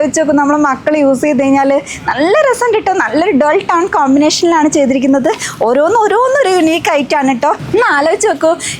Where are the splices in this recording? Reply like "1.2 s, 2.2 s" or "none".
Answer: 7.6 s